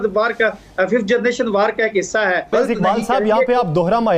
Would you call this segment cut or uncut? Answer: cut